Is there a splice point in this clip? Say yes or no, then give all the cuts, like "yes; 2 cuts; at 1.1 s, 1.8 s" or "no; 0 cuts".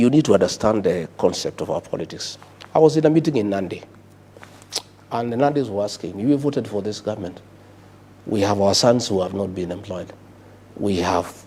no; 0 cuts